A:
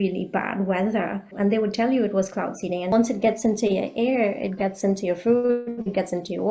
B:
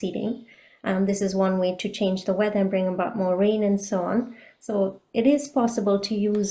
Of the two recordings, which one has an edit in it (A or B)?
A